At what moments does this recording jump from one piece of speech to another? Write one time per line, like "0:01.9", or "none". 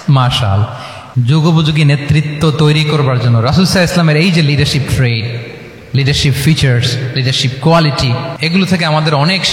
0:01.1
0:08.4